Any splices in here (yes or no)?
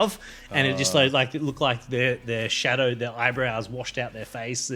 no